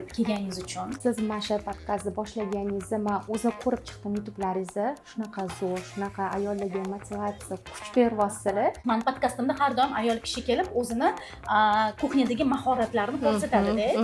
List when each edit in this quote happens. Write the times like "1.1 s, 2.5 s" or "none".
0.9 s, 8.8 s